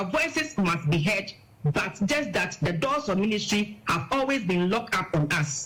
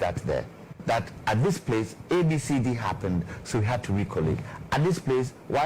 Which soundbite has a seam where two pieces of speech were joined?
second; 1 cut; at 1.1 s

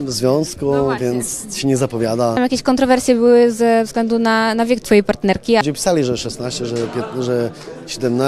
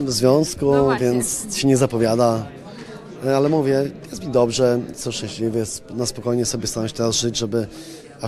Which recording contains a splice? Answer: first; 2 cuts; at 2.4 s, 5.6 s

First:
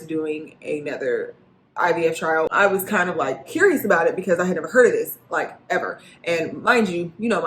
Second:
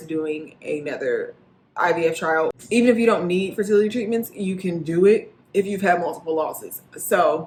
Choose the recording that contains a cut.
first; 1 cut; at 2.5 s

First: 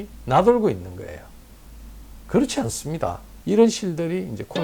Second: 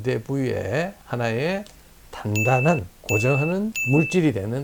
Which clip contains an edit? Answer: first; 1 cut; at 3.3 s

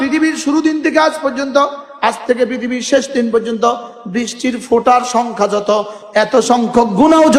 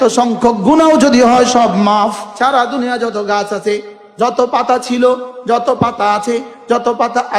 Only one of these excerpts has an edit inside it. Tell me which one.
second; 1 cut; at 2.3 s

